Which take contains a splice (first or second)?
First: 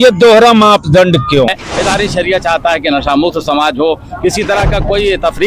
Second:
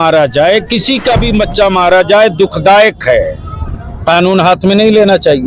first